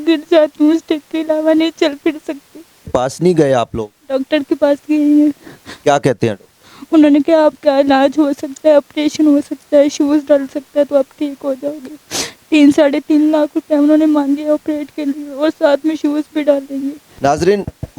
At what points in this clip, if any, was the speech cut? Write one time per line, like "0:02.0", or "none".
0:02.9
0:17.0

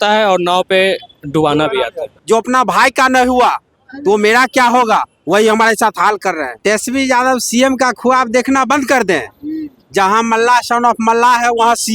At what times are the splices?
0:02.2
0:06.5

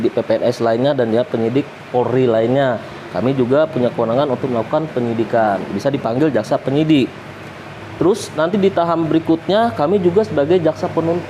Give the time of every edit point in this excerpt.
none

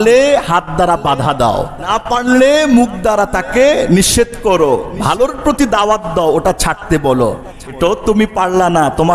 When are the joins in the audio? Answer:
0:01.9
0:07.6

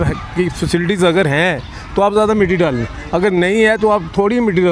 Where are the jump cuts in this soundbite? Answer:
none

